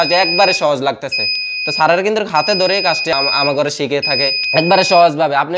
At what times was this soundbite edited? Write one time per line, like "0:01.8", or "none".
0:03.1
0:04.4